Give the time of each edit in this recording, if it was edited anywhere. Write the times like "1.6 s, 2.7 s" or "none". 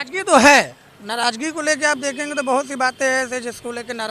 none